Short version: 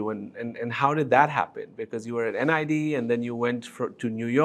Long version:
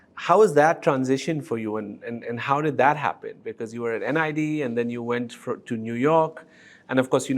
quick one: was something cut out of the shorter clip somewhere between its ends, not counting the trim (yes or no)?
no